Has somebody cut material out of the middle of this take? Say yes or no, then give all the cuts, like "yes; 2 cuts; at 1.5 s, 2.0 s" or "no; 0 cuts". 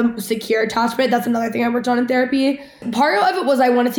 yes; 1 cut; at 2.8 s